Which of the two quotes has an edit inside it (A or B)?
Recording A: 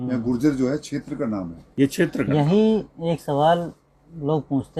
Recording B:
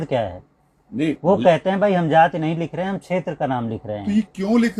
A